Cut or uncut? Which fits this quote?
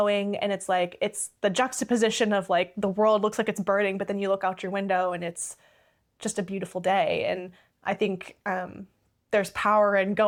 uncut